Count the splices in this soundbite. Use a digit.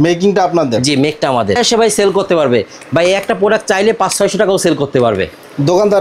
1